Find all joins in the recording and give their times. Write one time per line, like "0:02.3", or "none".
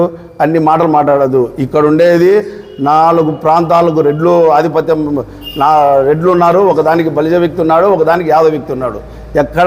none